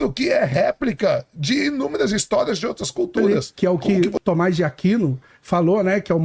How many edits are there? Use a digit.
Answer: 1